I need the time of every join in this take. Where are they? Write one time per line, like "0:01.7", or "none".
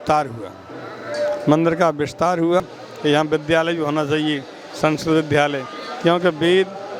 0:02.8